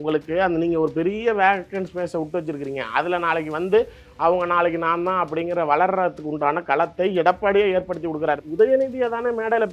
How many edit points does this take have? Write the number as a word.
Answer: one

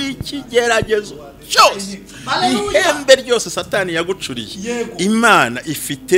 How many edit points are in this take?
zero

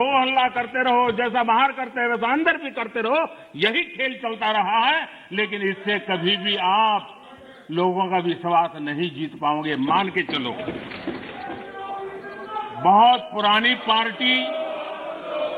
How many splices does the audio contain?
one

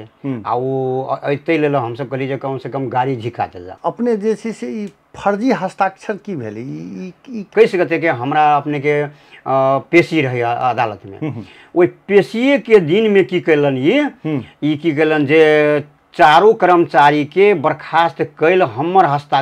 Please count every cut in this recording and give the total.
two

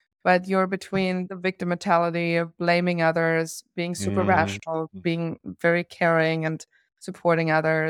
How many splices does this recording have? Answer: one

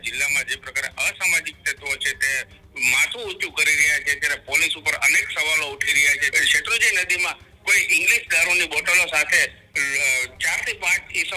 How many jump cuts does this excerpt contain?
one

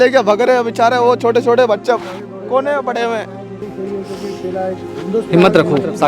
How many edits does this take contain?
one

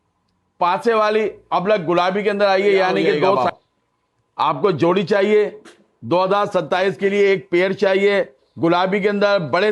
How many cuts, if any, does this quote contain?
one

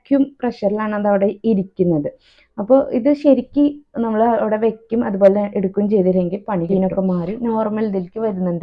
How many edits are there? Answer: one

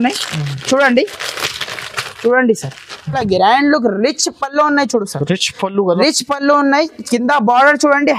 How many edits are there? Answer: one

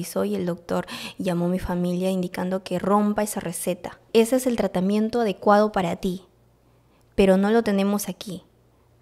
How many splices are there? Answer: one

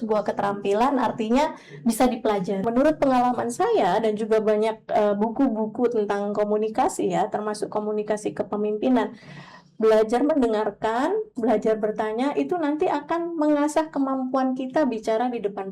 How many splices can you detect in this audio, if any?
one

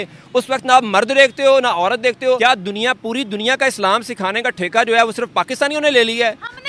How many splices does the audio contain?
one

